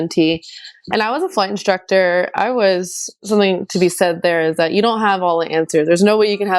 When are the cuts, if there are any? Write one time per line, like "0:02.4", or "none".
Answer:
0:03.2